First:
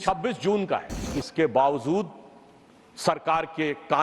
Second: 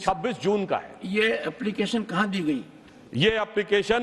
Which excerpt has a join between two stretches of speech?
first; 1 cut; at 1.1 s

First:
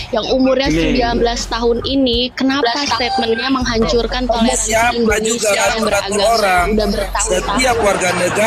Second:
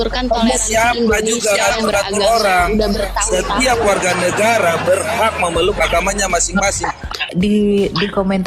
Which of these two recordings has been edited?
second; 1 cut; at 7.1 s

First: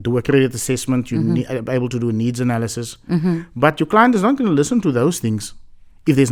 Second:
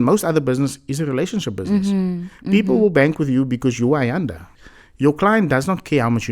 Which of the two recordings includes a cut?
second; 1 cut; at 4.4 s

